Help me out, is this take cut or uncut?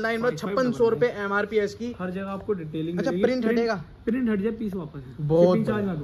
uncut